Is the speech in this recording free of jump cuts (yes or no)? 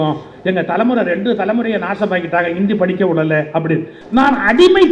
no